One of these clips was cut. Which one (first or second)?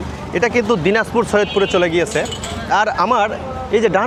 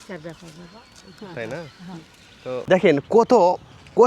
second